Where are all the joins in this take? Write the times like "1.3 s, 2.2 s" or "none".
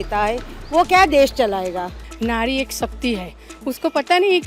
2.0 s